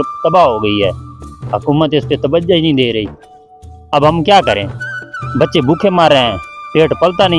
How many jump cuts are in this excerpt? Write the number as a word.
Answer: zero